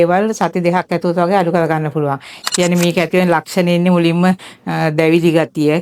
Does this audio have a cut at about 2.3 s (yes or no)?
yes